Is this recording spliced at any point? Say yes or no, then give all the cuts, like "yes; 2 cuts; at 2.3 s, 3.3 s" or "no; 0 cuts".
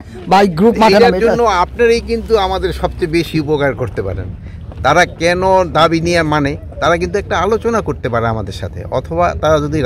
no; 0 cuts